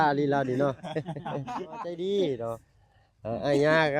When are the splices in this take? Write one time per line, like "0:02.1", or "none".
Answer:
0:01.9

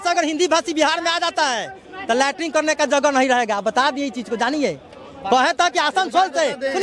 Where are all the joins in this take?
none

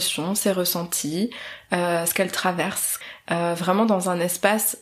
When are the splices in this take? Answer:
0:02.9

